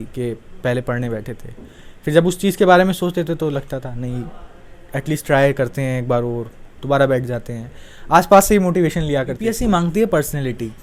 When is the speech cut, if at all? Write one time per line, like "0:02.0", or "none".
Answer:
0:09.4